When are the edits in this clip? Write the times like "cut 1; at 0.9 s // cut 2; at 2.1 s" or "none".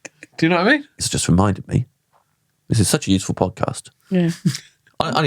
cut 1; at 1.1 s